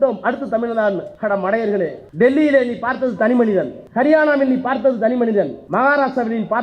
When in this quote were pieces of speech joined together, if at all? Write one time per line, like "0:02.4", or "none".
0:01.1
0:02.0
0:03.8
0:05.6